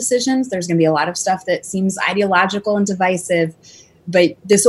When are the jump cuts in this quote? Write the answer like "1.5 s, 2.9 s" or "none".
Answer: none